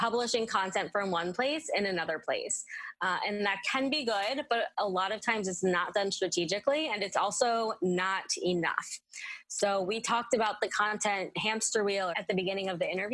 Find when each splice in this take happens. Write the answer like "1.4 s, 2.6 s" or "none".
12.2 s